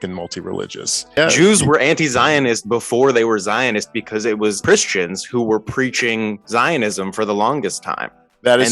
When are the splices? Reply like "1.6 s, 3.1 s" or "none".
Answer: 1.2 s, 4.6 s